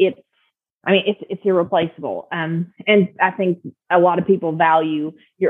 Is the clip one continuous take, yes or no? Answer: yes